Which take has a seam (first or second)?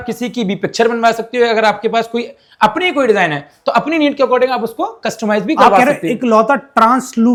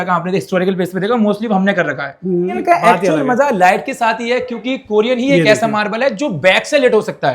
second